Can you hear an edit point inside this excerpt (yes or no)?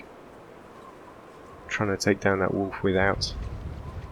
yes